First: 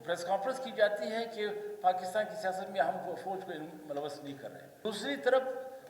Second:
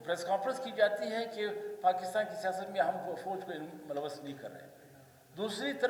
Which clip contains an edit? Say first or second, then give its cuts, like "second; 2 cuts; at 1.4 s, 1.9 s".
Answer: first; 1 cut; at 4.7 s